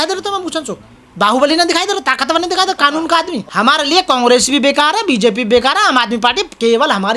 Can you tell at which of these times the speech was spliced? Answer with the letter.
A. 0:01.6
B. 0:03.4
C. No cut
B